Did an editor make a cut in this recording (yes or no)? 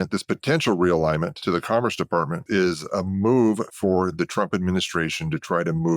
yes